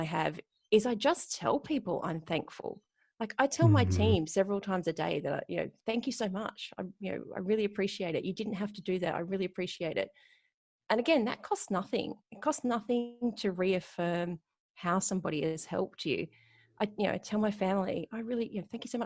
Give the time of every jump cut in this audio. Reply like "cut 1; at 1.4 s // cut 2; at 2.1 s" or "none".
none